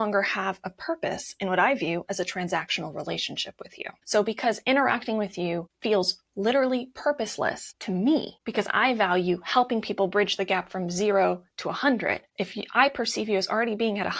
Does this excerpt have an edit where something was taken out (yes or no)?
yes